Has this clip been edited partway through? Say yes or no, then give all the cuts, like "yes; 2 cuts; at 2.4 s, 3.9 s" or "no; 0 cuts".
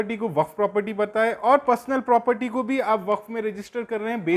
no; 0 cuts